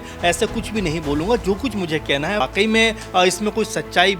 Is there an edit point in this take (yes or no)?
yes